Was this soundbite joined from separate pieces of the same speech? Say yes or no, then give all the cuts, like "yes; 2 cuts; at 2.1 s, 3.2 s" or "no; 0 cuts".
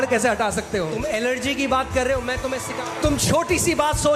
yes; 2 cuts; at 0.9 s, 2.6 s